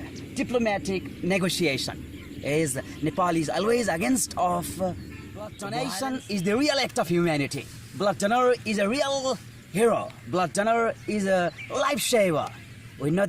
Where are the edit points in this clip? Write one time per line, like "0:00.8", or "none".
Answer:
0:05.6